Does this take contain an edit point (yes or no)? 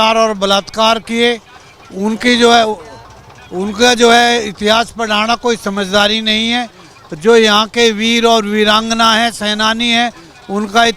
no